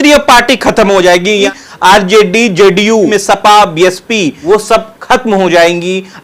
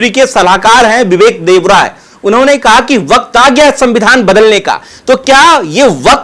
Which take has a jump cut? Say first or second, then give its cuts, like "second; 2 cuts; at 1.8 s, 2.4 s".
first; 3 cuts; at 1.5 s, 3.1 s, 4.3 s